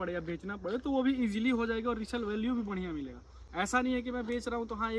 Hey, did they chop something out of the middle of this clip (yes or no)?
no